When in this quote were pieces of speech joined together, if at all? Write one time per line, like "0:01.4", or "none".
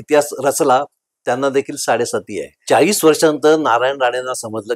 0:02.5